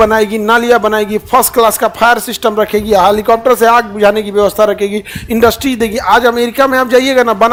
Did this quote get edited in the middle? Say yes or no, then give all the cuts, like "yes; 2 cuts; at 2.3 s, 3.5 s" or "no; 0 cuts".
no; 0 cuts